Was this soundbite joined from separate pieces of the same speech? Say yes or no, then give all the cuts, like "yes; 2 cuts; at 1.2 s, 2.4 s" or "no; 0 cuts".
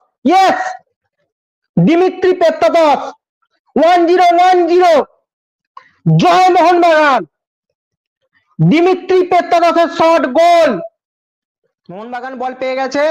yes; 1 cut; at 12.1 s